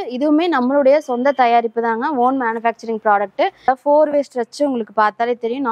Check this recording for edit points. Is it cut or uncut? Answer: cut